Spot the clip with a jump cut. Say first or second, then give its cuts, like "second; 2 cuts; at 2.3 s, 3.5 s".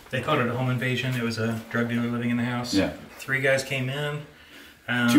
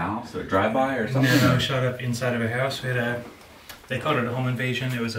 first; 1 cut; at 3.1 s